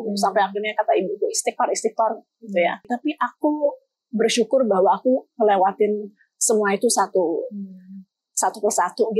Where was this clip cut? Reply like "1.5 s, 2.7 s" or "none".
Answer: 2.9 s